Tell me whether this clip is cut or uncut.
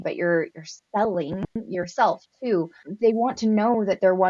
cut